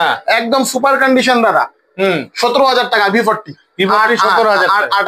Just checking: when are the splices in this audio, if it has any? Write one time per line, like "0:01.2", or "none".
none